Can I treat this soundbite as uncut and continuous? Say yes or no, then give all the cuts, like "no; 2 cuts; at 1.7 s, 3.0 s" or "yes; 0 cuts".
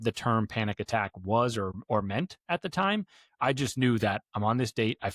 no; 1 cut; at 1.8 s